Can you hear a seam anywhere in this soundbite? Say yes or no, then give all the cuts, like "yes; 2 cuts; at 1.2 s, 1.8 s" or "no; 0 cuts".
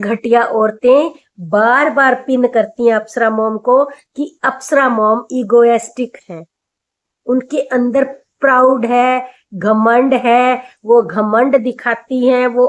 no; 0 cuts